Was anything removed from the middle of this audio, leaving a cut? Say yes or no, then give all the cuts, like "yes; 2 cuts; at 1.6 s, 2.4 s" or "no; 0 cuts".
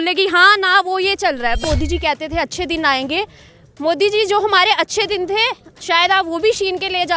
yes; 1 cut; at 1.6 s